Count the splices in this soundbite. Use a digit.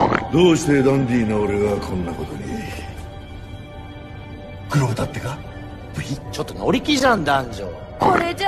1